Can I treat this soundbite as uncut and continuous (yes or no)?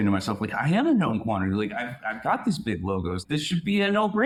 yes